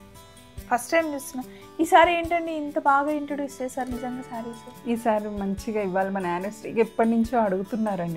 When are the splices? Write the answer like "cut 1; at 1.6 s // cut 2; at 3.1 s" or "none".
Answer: none